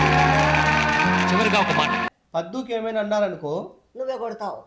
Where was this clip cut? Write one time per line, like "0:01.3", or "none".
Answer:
0:02.1